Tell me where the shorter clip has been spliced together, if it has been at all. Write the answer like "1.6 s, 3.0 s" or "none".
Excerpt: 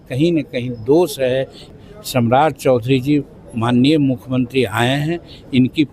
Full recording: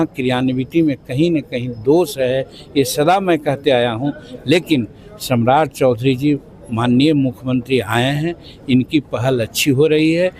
1.7 s